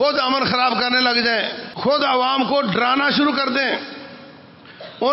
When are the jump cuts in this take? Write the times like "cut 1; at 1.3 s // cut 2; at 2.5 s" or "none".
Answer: cut 1; at 1.6 s